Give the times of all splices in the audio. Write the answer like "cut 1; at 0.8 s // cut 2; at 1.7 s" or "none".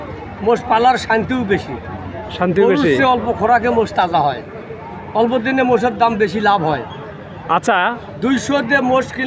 none

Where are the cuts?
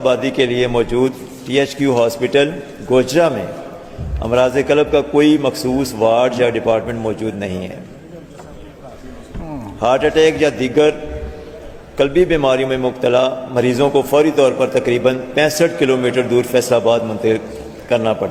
none

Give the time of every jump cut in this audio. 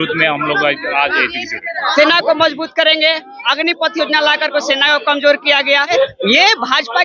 cut 1; at 1.9 s // cut 2; at 5.9 s

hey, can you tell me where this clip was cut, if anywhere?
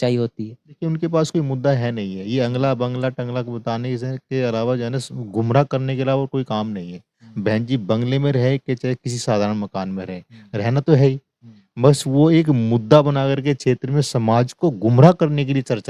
none

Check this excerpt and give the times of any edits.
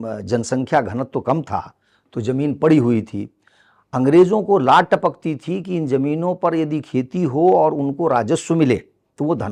none

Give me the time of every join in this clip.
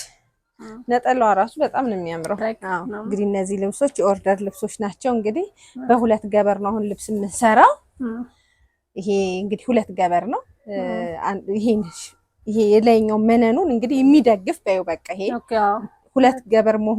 cut 1; at 2.4 s

